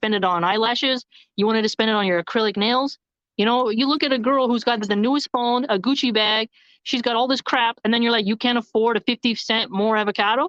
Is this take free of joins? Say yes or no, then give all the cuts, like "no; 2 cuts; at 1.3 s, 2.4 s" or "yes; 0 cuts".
yes; 0 cuts